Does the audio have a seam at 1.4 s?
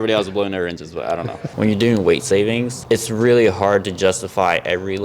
yes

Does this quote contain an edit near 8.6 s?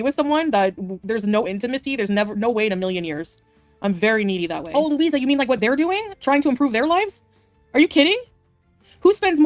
no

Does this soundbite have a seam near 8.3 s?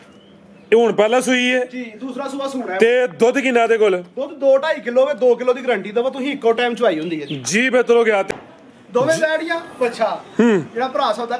yes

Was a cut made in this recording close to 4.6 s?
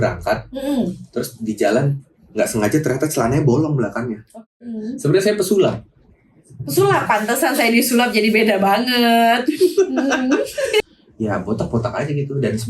yes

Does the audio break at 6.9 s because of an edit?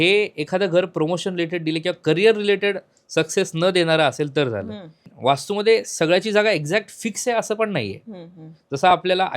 no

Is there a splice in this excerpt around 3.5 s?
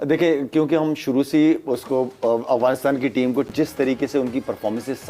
yes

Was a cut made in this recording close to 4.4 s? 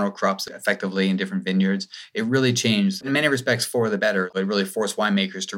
yes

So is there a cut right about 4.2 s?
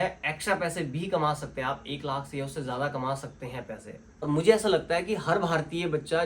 yes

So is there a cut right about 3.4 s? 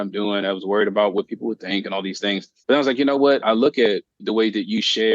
yes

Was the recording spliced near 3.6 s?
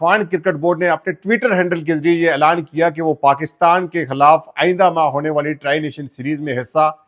no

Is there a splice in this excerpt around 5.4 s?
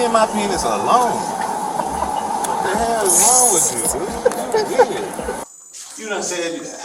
yes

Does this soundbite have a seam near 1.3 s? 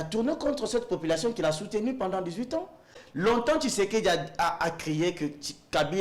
no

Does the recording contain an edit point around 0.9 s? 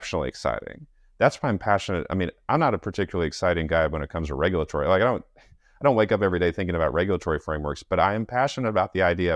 no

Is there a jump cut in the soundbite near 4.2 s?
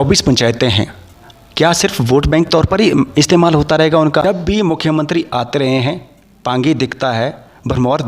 yes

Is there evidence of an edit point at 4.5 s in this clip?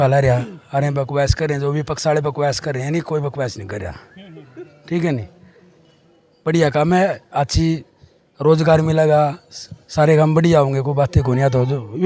no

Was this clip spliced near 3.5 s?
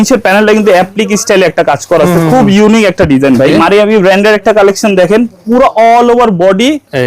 yes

